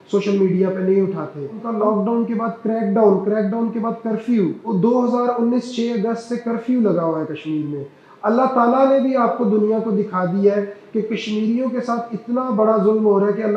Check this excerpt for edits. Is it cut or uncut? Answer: cut